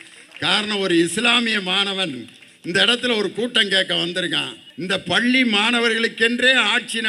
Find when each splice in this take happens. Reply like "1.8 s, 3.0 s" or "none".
5.2 s